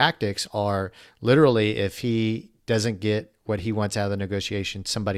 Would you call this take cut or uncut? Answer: uncut